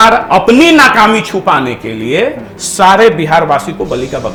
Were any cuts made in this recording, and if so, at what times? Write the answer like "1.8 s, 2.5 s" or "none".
none